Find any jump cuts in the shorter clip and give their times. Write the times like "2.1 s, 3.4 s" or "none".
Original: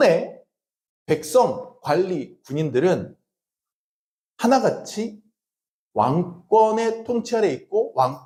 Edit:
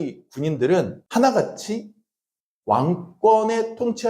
1.0 s